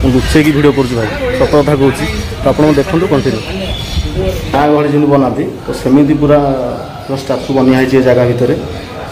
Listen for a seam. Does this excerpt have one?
yes; 1 cut; at 4.5 s

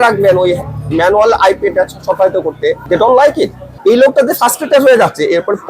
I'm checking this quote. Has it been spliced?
yes; 2 cuts; at 2.8 s, 3.6 s

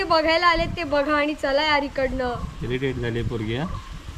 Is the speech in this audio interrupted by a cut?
no; 0 cuts

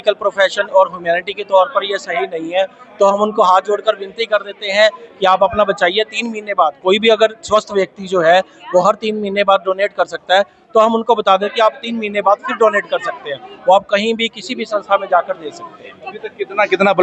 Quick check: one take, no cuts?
yes; 0 cuts

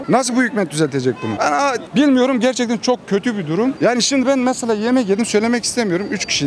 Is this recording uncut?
yes; 0 cuts

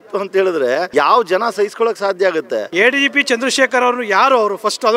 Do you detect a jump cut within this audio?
yes; 2 cuts; at 0.9 s, 2.7 s

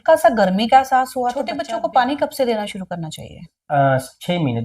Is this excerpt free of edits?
no; 2 cuts; at 1.6 s, 3.5 s

